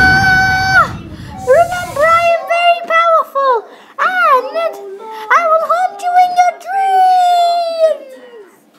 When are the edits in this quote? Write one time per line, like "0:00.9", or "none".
none

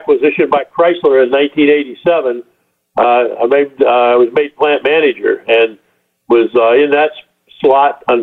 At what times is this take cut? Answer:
none

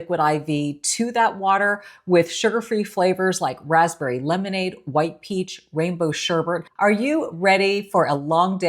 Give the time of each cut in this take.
0:06.7

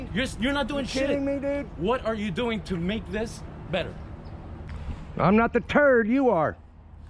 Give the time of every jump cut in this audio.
0:04.7

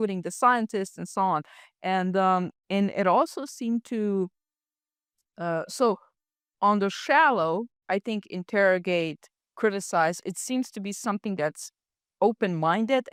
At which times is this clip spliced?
none

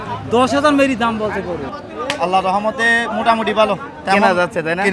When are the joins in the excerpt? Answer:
0:01.8

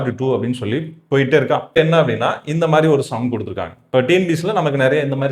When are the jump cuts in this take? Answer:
0:01.8

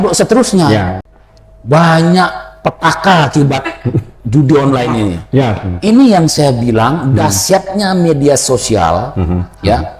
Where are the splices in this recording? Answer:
0:01.0

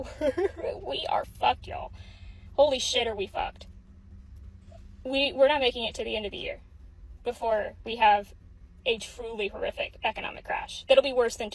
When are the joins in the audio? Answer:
none

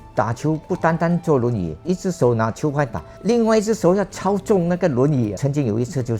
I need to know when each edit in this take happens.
0:01.8
0:03.0
0:05.4

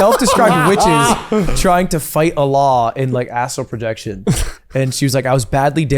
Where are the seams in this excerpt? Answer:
none

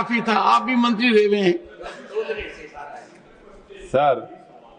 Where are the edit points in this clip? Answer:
none

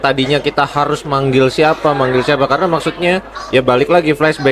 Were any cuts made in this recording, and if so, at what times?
none

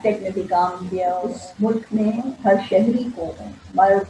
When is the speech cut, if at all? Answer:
0:01.3

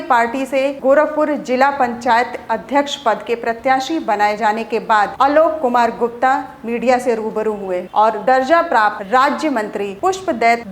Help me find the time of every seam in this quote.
0:07.9

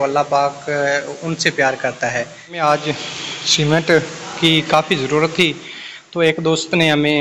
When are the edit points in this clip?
0:02.4

